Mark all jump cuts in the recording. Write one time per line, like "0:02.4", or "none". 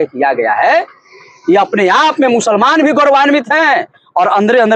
none